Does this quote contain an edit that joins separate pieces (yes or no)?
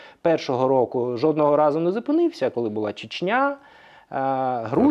no